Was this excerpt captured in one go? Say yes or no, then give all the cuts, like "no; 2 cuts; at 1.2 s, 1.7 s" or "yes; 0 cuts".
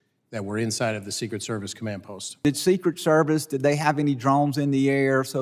no; 1 cut; at 2.3 s